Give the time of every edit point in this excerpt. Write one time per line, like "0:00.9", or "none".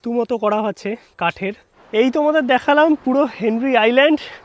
0:01.7